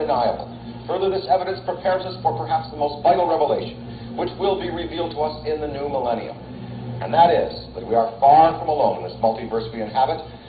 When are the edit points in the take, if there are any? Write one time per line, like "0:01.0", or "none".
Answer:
0:03.3